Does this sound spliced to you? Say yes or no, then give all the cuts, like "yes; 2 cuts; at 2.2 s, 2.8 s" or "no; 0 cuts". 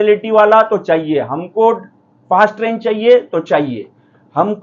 no; 0 cuts